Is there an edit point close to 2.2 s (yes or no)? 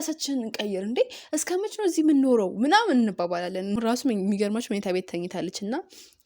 no